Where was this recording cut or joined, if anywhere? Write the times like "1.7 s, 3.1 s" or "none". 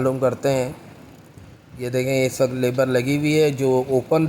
none